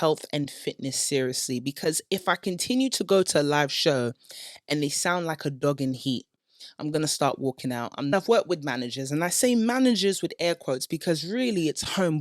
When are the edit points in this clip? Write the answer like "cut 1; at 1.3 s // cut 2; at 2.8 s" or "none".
cut 1; at 8.1 s